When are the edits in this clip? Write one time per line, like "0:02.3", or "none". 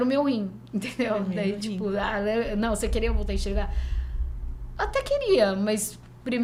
none